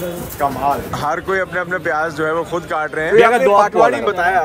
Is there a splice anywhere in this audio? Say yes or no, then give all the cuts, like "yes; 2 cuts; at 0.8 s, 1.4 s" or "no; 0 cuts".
yes; 2 cuts; at 0.9 s, 3.1 s